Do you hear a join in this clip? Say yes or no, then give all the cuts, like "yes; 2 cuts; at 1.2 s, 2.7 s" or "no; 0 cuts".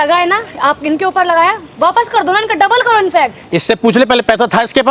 no; 0 cuts